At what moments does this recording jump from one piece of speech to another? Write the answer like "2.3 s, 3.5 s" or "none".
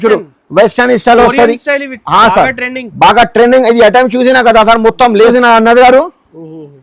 5.3 s